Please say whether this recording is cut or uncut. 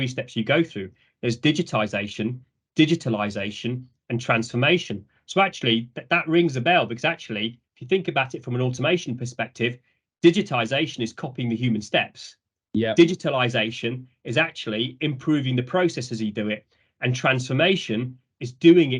uncut